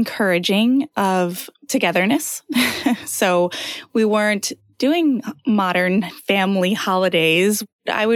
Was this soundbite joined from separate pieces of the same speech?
no; 0 cuts

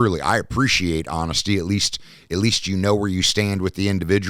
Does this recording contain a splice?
no; 0 cuts

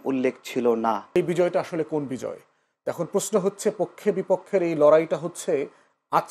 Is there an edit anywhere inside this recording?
yes; 1 cut; at 1.0 s

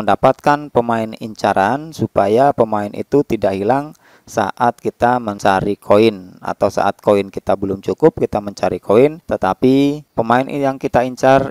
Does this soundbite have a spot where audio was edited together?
yes; 3 cuts; at 5.3 s, 9.2 s, 10.0 s

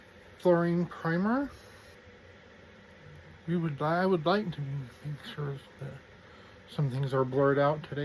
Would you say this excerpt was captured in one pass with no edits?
no; 1 cut; at 1.9 s

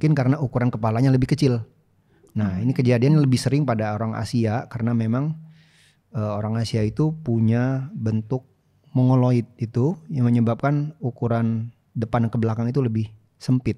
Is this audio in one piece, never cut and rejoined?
no; 1 cut; at 11.8 s

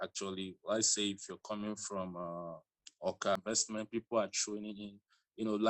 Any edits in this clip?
yes; 1 cut; at 3.4 s

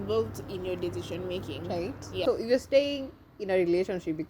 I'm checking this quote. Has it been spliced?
yes; 1 cut; at 2.2 s

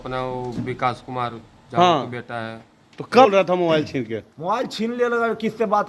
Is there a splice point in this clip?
yes; 1 cut; at 3.3 s

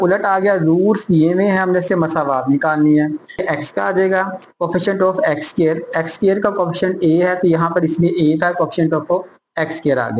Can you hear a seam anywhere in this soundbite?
yes; 1 cut; at 3.4 s

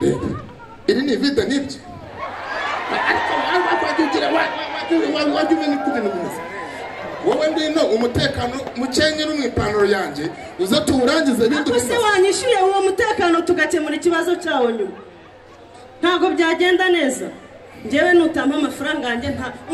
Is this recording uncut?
yes; 0 cuts

